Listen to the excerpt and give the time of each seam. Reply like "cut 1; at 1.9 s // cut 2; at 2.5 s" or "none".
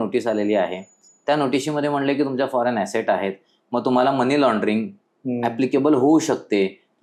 none